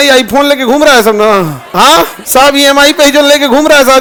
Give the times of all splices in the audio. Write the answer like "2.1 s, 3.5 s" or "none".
none